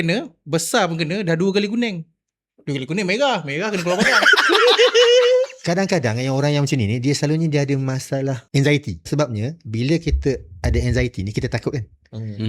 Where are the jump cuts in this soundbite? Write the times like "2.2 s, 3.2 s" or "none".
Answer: 5.6 s, 8.4 s, 9.1 s